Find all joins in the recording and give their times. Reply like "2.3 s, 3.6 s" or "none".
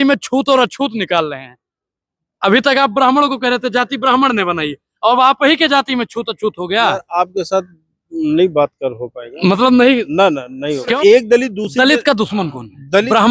10.9 s